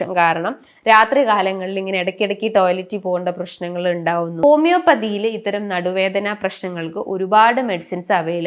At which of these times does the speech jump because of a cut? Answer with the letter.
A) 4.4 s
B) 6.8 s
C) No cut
A